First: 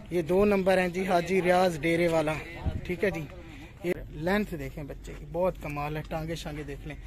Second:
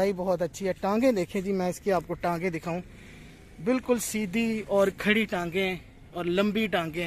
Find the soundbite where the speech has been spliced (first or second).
first